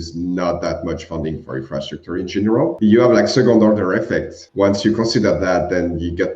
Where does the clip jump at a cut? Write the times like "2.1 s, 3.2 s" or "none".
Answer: 2.7 s, 4.4 s